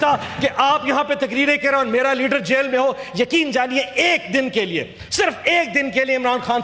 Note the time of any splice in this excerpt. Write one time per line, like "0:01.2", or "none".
none